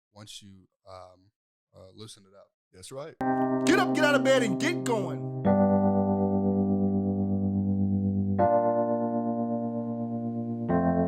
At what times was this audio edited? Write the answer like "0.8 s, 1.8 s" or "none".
3.1 s